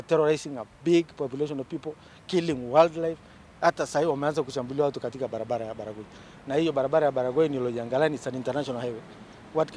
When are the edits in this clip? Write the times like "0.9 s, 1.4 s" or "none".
none